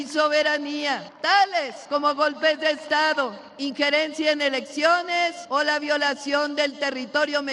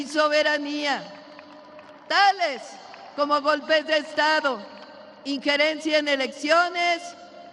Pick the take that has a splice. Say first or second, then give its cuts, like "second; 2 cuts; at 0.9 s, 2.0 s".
first; 4 cuts; at 1.1 s, 1.8 s, 3.5 s, 5.4 s